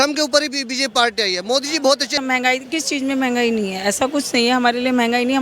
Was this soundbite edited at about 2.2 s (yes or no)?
yes